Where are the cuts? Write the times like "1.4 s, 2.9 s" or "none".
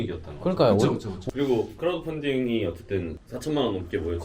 1.2 s